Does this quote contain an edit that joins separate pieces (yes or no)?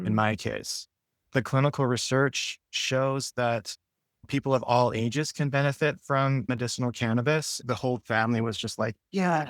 yes